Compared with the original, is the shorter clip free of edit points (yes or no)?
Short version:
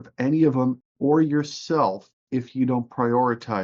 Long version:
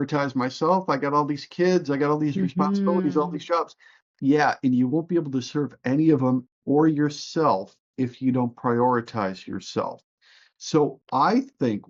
yes